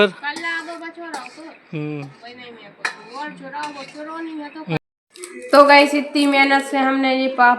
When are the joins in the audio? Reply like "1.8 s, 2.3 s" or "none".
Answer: 4.8 s